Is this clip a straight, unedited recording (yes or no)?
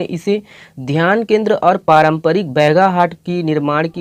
yes